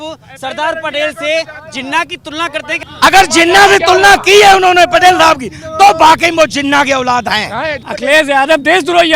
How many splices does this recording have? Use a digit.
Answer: 2